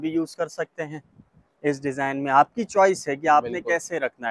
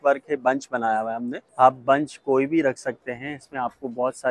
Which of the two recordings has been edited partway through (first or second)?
second